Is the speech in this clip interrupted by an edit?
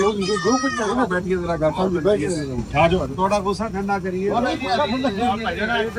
no; 0 cuts

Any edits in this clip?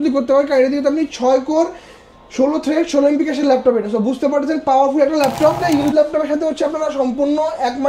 yes; 1 cut; at 5.6 s

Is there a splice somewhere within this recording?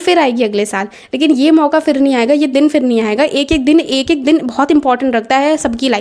no; 0 cuts

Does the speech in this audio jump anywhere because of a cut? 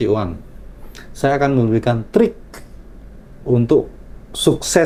no; 0 cuts

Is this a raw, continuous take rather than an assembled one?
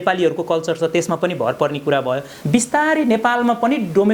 no; 1 cut; at 2.3 s

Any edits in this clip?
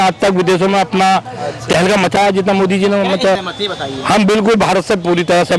yes; 1 cut; at 3.4 s

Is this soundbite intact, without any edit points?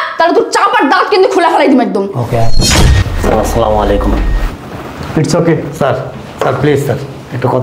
no; 1 cut; at 2.8 s

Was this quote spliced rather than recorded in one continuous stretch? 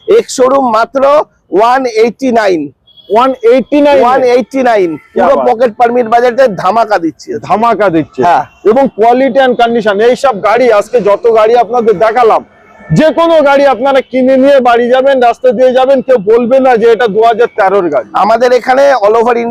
no; 0 cuts

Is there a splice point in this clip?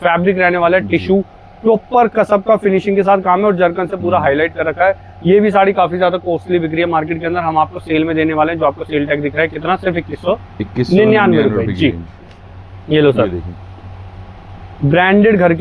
no; 0 cuts

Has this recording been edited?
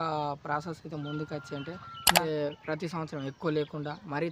yes; 1 cut; at 2.2 s

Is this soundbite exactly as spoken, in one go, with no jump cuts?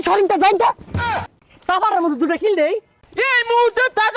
no; 2 cuts; at 1.2 s, 3.0 s

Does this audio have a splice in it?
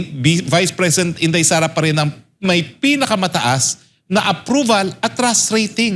no; 0 cuts

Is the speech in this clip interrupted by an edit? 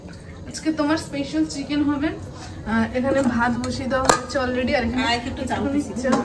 no; 0 cuts

